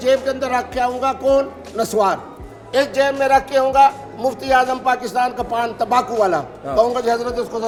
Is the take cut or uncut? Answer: uncut